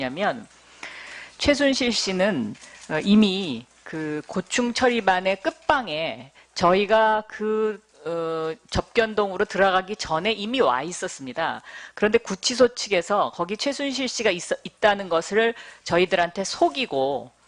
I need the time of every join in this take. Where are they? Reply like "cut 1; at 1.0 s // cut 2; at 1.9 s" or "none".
cut 1; at 3.8 s